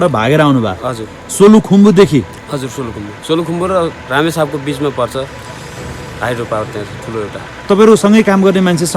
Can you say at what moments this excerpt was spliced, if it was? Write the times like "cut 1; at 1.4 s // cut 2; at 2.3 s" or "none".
cut 1; at 7.6 s